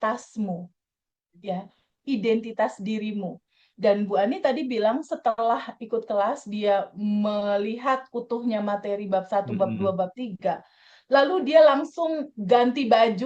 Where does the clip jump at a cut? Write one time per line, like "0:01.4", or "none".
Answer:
none